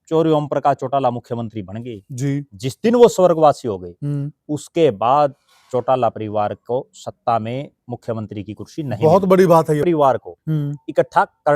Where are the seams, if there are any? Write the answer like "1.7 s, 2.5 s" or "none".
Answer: 9.8 s